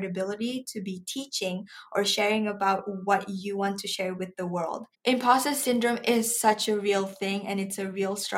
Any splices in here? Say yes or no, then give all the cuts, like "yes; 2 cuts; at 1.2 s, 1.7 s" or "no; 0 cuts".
yes; 1 cut; at 4.8 s